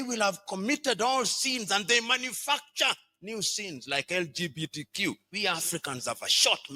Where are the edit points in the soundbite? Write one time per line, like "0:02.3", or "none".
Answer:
0:05.3